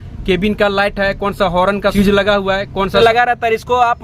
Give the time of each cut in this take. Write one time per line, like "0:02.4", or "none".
0:01.9
0:03.0